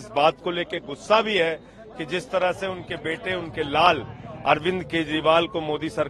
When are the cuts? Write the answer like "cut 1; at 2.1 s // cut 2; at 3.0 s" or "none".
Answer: none